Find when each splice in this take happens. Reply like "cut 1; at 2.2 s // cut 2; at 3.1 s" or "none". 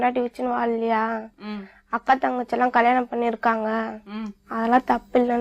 none